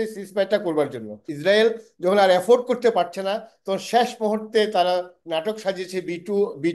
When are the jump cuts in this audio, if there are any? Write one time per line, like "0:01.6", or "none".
0:01.2